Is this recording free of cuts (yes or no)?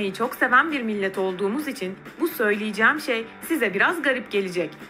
yes